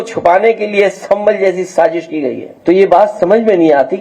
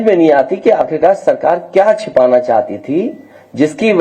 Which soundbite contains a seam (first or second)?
first